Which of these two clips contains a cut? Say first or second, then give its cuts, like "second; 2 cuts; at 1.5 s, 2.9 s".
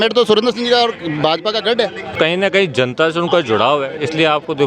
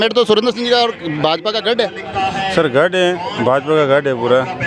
first; 1 cut; at 2.2 s